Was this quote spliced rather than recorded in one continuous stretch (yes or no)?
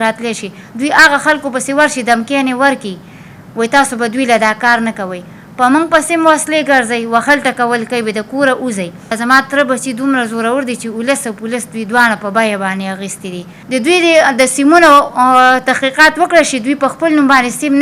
yes